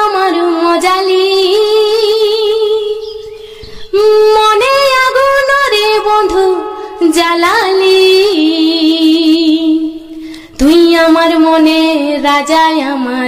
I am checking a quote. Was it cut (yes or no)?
no